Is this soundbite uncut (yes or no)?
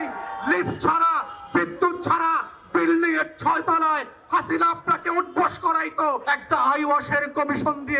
no